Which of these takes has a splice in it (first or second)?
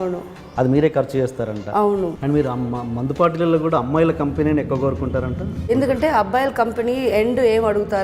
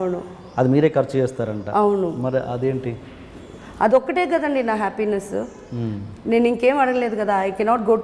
first